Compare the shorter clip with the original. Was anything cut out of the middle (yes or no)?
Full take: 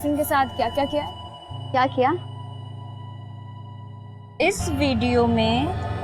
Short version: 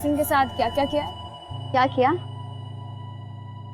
no